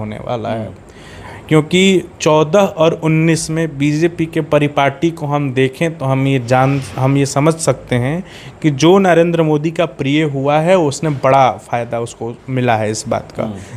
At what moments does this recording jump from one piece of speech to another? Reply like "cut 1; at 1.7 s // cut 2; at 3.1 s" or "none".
none